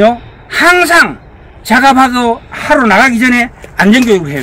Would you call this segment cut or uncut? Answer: uncut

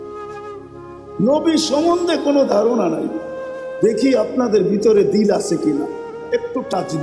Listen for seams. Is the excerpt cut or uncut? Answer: uncut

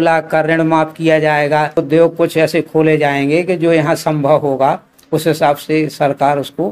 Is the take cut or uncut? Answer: cut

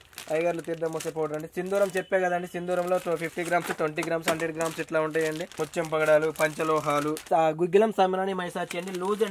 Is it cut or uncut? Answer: cut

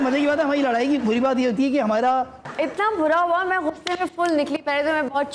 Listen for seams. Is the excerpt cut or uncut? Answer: cut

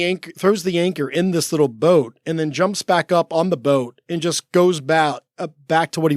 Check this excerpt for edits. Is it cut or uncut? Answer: uncut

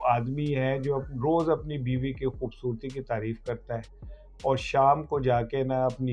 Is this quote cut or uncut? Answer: uncut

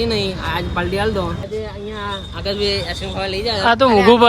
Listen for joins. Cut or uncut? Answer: cut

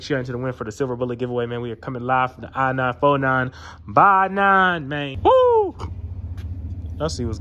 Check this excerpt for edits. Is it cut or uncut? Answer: cut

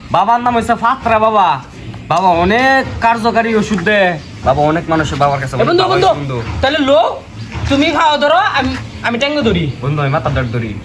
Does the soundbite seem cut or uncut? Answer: uncut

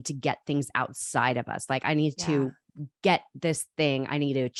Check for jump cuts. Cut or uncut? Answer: uncut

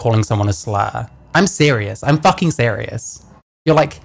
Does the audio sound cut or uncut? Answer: uncut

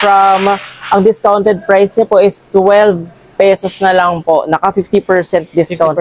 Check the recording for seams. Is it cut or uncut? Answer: uncut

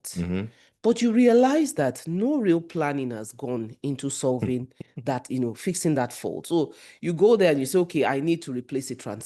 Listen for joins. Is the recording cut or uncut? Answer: uncut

